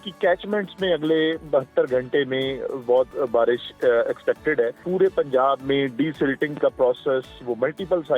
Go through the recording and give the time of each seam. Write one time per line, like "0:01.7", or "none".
0:03.1
0:04.8